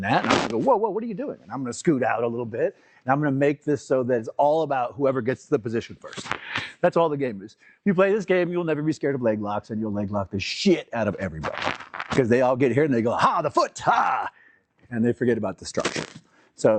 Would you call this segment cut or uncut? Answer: uncut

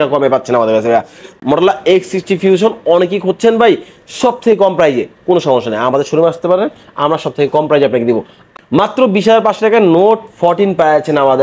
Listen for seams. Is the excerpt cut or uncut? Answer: cut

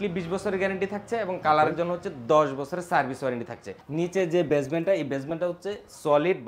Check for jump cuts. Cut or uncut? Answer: cut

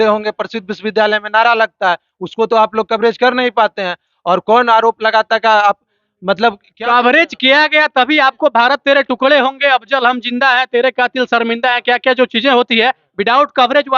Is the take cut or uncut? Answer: uncut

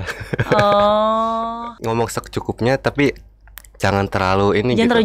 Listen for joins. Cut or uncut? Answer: cut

